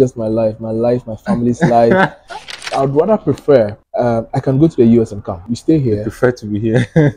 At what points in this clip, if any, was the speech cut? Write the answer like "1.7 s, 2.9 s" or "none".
2.6 s, 5.4 s